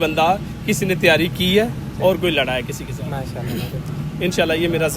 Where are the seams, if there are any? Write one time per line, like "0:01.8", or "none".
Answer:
none